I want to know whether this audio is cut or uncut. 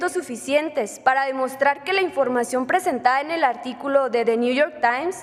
uncut